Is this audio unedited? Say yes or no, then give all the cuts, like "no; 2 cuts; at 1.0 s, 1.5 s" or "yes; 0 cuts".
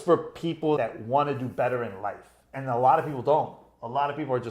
no; 2 cuts; at 0.8 s, 2.5 s